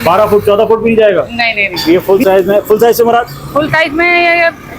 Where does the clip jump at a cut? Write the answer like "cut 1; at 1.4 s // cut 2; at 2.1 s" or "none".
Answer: cut 1; at 1.7 s